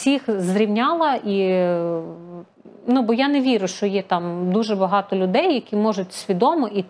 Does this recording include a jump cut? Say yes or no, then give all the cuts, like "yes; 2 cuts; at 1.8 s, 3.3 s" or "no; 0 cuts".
no; 0 cuts